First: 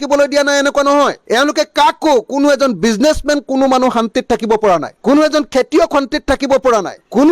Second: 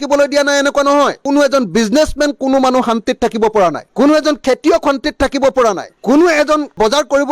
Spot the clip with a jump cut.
second; 1 cut; at 1.2 s

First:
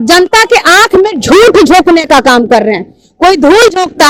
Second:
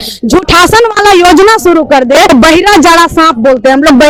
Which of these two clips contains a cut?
second; 1 cut; at 2.3 s

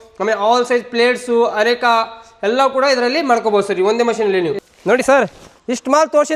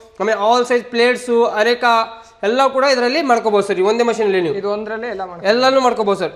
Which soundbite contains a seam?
first; 2 cuts; at 4.6 s, 5.5 s

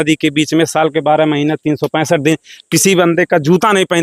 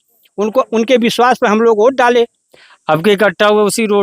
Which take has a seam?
second; 1 cut; at 2.7 s

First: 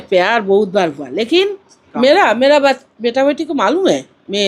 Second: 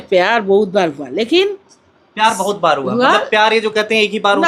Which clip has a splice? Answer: first; 1 cut; at 1.8 s

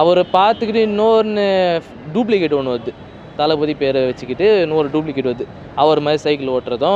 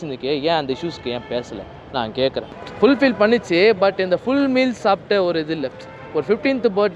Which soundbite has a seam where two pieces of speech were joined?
second; 1 cut; at 2.6 s

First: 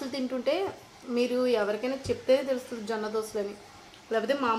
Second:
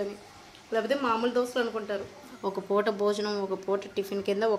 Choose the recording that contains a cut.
second; 1 cut; at 2.2 s

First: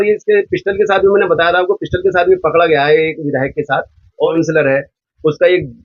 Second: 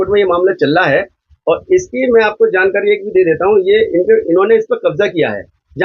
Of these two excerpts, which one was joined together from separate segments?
first; 1 cut; at 4.3 s

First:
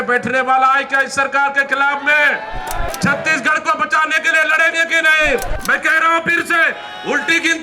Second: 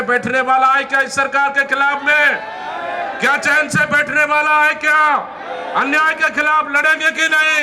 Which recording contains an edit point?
first; 2 cuts; at 2.9 s, 5.5 s

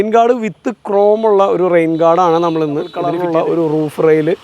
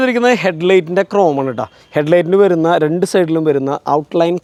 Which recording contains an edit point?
first; 1 cut; at 3.1 s

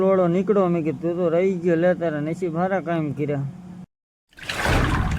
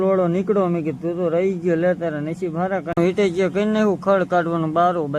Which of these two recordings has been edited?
second; 1 cut; at 3.0 s

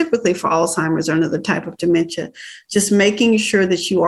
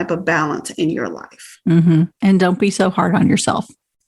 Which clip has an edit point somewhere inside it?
second; 1 cut; at 2.1 s

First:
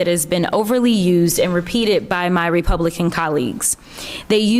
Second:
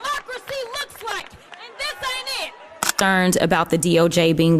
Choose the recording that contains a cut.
second; 1 cut; at 2.9 s

